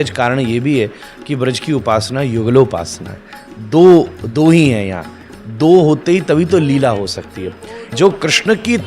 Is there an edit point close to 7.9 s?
yes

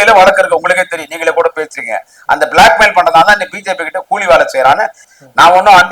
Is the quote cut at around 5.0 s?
yes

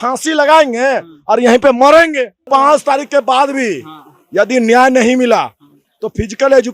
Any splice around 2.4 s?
yes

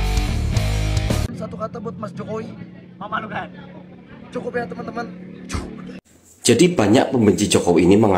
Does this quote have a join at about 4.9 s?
no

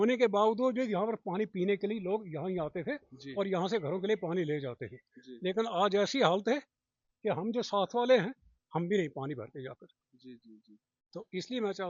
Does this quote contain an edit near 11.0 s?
no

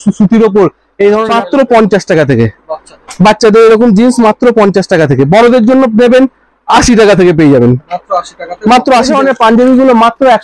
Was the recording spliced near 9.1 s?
yes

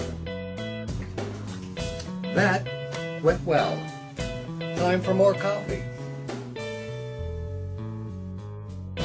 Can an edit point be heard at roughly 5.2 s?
no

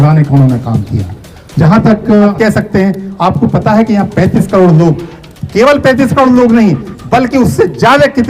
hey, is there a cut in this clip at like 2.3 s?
yes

